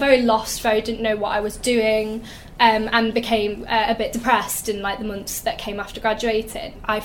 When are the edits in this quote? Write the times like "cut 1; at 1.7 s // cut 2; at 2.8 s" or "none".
none